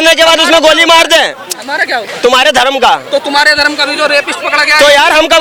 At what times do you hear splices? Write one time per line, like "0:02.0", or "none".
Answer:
none